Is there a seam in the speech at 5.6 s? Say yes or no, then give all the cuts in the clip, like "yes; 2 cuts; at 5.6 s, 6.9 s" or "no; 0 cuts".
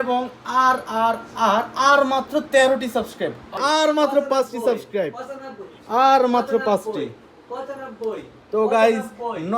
no; 1 cut; at 3.5 s